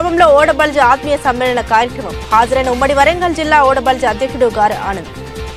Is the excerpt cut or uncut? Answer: uncut